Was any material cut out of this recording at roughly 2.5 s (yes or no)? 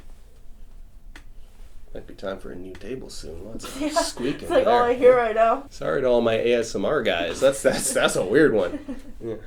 no